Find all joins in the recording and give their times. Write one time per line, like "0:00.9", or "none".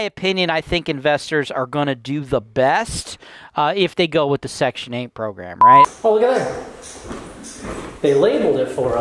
0:05.5